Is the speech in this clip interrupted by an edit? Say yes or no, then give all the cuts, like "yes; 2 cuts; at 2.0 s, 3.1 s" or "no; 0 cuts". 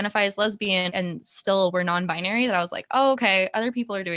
yes; 1 cut; at 0.9 s